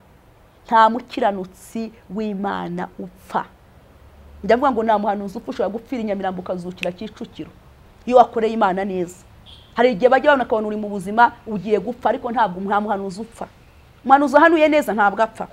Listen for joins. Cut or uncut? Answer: uncut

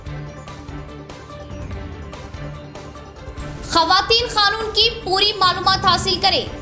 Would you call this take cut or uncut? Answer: uncut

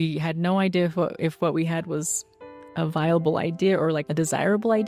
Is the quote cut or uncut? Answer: uncut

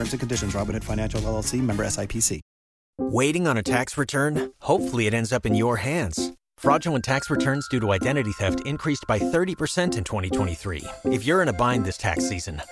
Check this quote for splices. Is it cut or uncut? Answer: cut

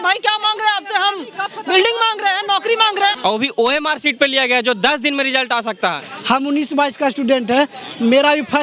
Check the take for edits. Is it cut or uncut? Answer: cut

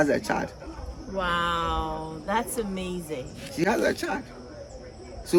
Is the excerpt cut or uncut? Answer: uncut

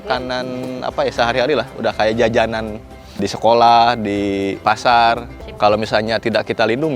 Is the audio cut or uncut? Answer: cut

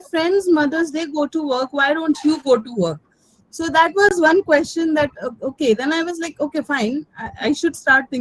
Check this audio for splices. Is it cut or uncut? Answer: uncut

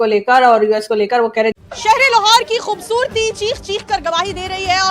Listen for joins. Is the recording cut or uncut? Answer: cut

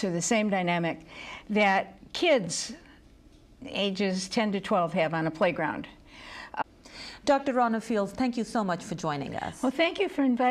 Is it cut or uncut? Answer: uncut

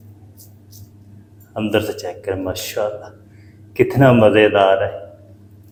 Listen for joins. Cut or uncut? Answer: uncut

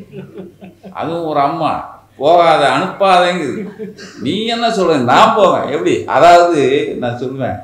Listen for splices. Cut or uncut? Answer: uncut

